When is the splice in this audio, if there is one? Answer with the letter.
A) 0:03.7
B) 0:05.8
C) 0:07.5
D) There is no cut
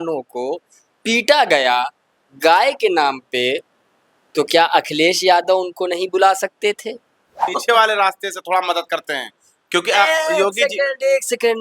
C